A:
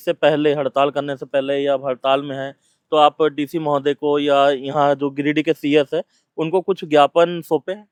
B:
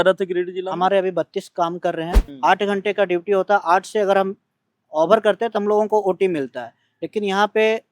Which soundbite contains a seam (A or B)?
B